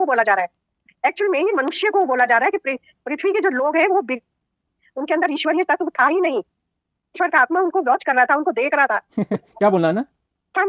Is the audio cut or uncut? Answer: cut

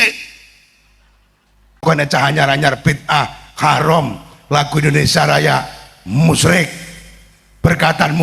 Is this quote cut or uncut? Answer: cut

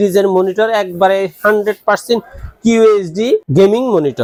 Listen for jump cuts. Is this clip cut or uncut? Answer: uncut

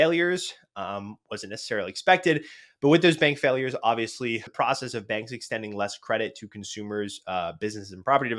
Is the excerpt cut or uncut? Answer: cut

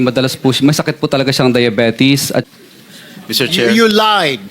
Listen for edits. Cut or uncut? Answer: cut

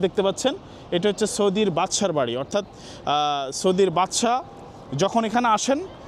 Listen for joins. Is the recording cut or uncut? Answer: uncut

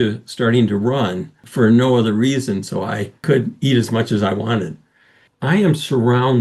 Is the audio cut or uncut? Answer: cut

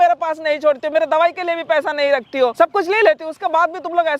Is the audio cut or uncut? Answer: cut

